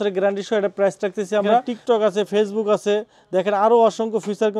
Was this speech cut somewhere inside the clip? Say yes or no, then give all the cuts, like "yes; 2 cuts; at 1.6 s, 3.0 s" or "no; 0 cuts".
yes; 1 cut; at 1.6 s